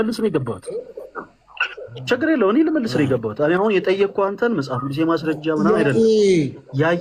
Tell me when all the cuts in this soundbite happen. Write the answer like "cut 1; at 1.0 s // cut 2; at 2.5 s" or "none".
none